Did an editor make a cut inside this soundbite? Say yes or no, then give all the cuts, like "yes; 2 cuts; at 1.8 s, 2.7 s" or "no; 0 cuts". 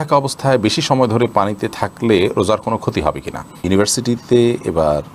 yes; 1 cut; at 3.6 s